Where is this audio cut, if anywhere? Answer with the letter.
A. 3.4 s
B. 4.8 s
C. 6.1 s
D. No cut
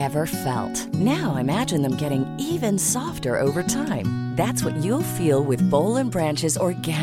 D